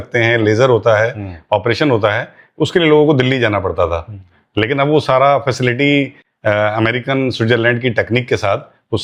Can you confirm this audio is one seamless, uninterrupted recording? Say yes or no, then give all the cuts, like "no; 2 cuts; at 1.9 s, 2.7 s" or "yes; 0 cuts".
yes; 0 cuts